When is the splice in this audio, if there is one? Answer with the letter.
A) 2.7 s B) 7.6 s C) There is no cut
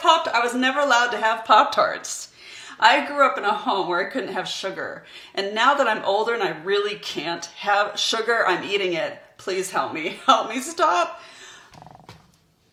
C